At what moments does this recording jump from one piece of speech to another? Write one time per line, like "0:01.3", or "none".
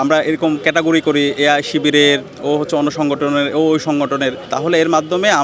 0:04.4